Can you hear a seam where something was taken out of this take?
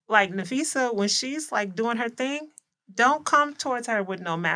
no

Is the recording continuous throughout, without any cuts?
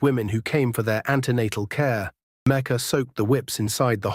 no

